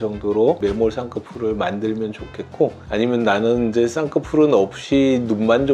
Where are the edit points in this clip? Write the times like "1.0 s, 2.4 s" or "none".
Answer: none